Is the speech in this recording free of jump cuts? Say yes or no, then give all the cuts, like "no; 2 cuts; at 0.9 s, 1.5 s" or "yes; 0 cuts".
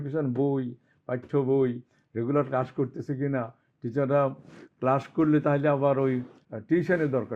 no; 1 cut; at 6.4 s